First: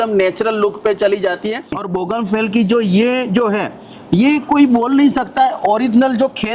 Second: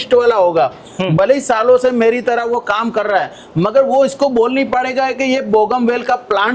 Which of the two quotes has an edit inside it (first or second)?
first